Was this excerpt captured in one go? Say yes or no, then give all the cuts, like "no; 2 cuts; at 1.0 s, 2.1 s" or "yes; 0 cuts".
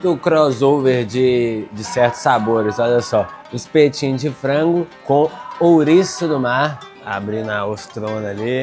no; 1 cut; at 6.9 s